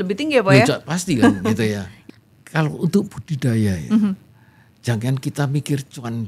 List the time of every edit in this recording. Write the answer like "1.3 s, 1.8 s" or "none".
1.9 s